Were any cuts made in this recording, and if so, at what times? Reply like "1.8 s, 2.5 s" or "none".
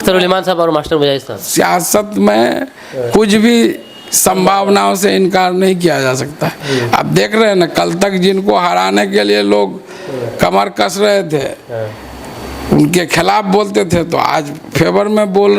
none